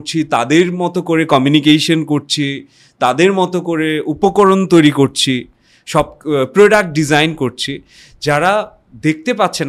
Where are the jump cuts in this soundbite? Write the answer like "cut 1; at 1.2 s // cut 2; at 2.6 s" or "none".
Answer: none